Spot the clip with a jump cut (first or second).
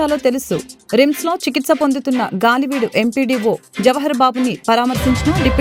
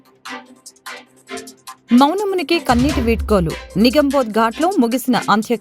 second